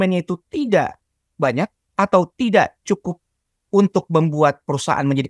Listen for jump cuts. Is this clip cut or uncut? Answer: uncut